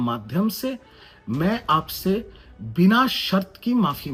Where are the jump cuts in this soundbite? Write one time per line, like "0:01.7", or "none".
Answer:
none